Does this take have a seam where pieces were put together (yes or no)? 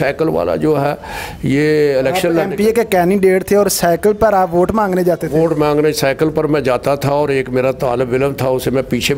no